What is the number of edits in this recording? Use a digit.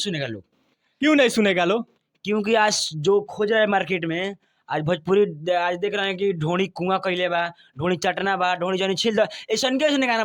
0